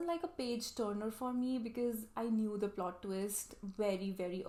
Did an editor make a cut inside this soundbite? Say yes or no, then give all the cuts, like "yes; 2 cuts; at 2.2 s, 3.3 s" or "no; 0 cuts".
no; 0 cuts